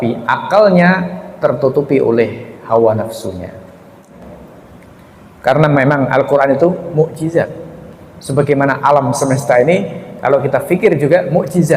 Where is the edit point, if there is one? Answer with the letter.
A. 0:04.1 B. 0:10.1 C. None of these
A